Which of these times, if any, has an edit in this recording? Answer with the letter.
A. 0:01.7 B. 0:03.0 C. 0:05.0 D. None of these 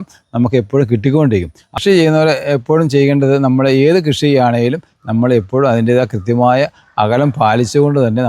A